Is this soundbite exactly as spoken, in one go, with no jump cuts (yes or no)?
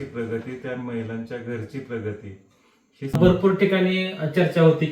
no